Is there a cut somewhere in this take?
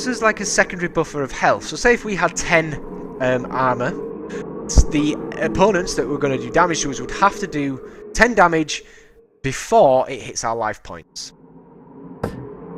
no; 0 cuts

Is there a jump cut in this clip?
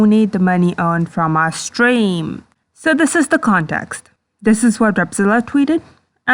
no; 0 cuts

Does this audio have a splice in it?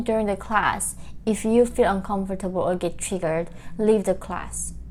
no; 0 cuts

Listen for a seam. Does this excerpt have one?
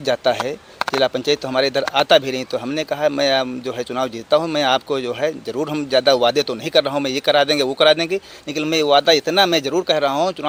no; 0 cuts

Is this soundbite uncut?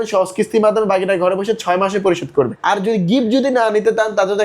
no; 1 cut; at 2.6 s

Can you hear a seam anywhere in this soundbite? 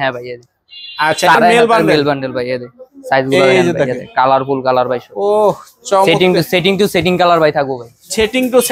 yes; 1 cut; at 1.3 s

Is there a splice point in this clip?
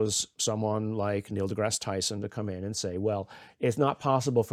no; 0 cuts

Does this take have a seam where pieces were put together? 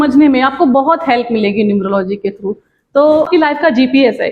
yes; 1 cut; at 3.3 s

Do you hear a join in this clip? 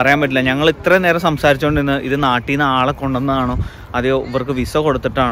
no; 0 cuts

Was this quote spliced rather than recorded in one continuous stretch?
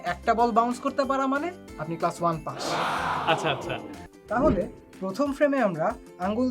yes; 1 cut; at 4.0 s

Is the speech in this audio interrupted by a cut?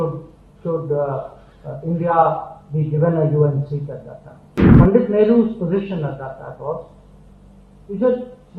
yes; 1 cut; at 4.7 s

